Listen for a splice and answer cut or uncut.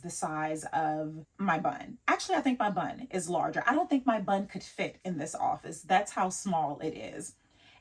uncut